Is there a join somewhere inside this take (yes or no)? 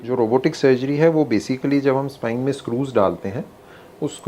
no